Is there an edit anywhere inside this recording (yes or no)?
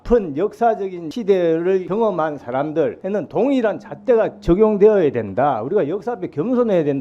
yes